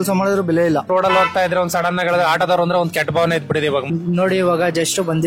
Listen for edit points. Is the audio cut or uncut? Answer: cut